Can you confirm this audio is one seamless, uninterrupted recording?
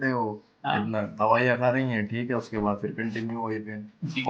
yes; 0 cuts

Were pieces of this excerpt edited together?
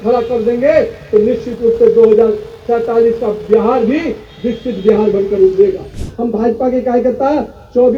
yes; 1 cut; at 6.1 s

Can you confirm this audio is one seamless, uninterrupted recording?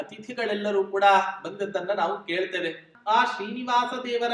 no; 1 cut; at 2.9 s

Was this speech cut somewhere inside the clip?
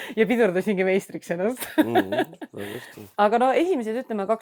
no; 0 cuts

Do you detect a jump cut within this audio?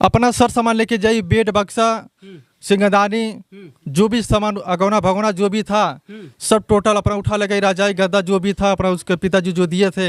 no; 0 cuts

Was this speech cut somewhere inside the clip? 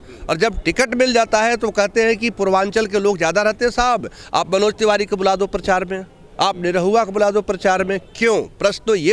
no; 0 cuts

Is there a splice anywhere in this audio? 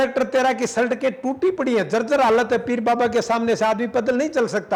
no; 0 cuts

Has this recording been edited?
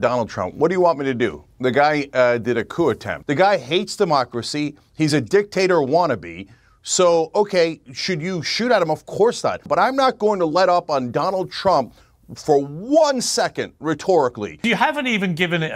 yes; 3 cuts; at 3.1 s, 9.7 s, 14.6 s

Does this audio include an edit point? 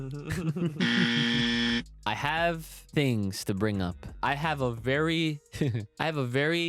yes; 4 cuts; at 1.9 s, 2.7 s, 4.1 s, 5.9 s

